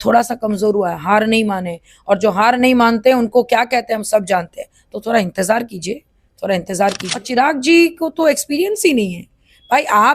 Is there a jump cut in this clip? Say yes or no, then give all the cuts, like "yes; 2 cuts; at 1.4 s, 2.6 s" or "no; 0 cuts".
yes; 1 cut; at 7.1 s